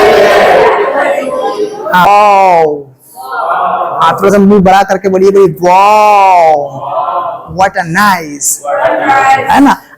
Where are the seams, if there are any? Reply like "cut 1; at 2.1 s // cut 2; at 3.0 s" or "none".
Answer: cut 1; at 2.1 s